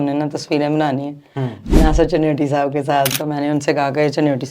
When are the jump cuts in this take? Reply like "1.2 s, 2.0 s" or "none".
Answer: 3.1 s